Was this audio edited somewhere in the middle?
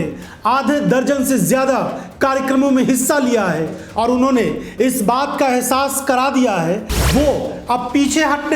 yes; 1 cut; at 6.9 s

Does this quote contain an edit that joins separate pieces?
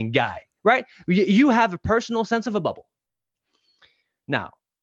no; 0 cuts

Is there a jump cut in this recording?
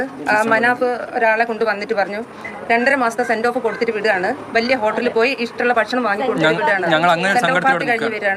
no; 0 cuts

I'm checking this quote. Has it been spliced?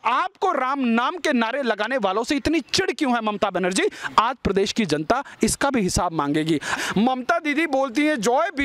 yes; 1 cut; at 6.7 s

